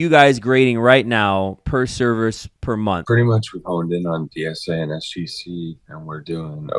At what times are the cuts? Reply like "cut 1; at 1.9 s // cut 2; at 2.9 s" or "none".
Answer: cut 1; at 3.0 s